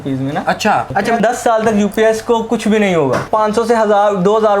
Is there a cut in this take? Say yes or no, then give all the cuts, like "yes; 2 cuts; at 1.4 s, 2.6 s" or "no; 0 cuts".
yes; 2 cuts; at 1.2 s, 3.2 s